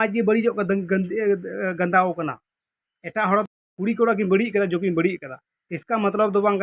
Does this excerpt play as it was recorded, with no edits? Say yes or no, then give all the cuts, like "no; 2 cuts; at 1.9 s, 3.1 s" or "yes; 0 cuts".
no; 1 cut; at 3.5 s